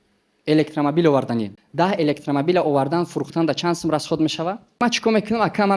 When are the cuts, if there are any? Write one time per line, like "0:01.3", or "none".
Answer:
0:01.6
0:04.8